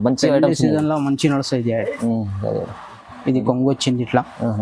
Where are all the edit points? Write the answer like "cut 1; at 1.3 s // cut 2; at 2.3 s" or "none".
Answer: cut 1; at 3.0 s